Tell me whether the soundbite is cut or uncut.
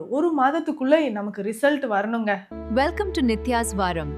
cut